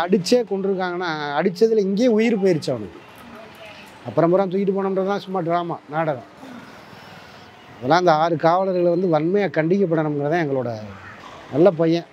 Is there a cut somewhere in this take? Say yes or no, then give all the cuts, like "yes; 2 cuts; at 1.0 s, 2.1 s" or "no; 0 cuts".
no; 0 cuts